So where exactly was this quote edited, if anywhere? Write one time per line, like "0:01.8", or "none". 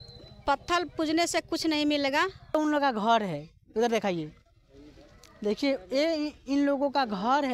0:02.6